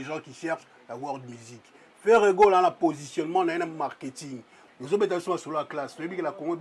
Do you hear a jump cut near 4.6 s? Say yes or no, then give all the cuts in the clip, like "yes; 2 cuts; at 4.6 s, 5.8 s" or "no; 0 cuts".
yes; 1 cut; at 4.6 s